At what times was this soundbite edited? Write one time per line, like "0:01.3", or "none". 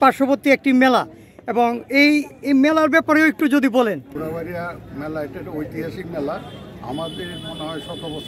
0:04.1